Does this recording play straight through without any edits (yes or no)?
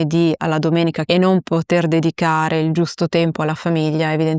no